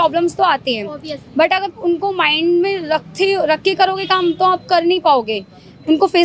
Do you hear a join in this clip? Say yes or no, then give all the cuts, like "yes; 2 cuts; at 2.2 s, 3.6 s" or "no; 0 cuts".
no; 0 cuts